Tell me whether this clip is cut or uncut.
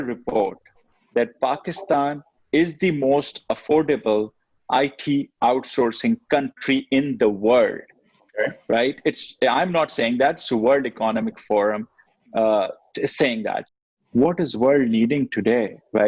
cut